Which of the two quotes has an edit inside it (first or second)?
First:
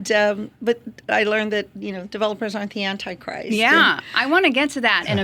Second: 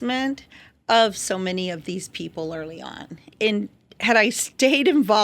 second